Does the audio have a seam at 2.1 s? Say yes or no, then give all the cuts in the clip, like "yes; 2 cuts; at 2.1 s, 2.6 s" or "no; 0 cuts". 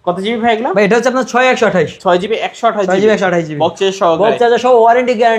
no; 0 cuts